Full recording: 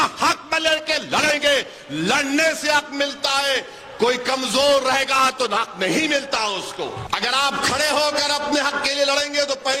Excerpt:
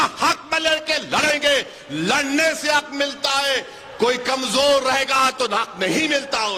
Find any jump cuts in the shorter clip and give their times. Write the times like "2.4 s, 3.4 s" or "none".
none

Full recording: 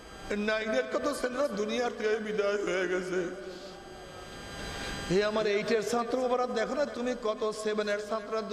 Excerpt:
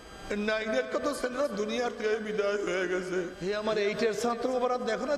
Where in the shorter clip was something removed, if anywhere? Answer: 3.4 s

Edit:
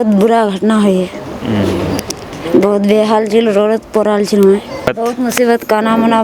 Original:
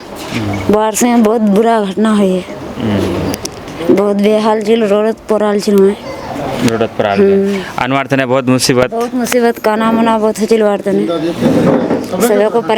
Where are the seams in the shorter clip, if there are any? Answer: 4.9 s

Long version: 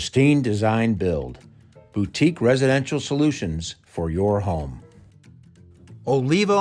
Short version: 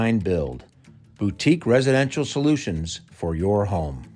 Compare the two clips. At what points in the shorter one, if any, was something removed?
none

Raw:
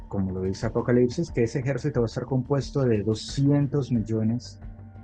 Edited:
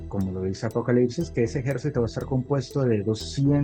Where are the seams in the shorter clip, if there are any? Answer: none

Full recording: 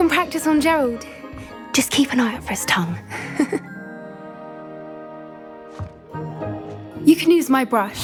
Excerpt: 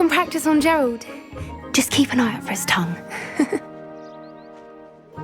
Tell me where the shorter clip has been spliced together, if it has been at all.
3.6 s

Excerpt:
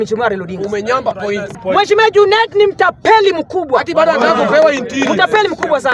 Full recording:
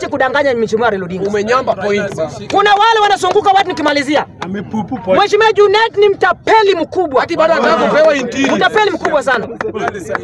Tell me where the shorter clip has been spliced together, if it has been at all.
1.5 s

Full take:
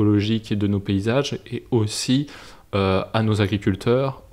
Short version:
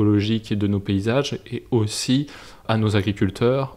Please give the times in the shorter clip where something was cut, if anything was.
2.6 s

